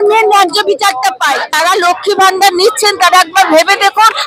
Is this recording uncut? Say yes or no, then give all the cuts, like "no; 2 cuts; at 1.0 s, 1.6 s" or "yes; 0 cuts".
no; 1 cut; at 1.5 s